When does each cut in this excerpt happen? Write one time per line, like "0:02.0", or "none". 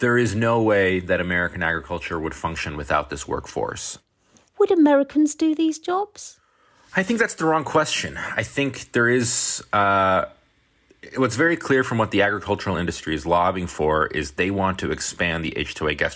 none